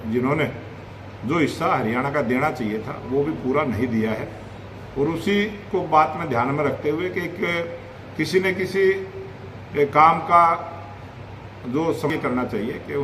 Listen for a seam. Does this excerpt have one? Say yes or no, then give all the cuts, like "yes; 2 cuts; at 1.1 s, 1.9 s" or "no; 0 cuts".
yes; 1 cut; at 12.1 s